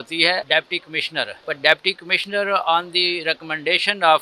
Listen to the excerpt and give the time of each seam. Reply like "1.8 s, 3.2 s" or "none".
1.0 s